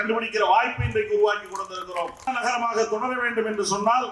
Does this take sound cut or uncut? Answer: cut